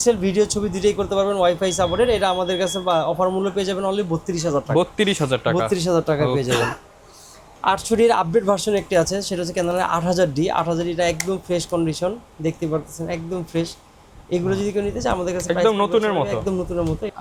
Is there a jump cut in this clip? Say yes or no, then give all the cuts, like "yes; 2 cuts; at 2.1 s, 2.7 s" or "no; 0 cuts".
no; 0 cuts